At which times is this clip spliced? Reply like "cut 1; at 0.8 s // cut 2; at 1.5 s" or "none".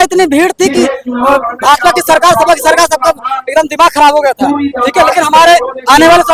none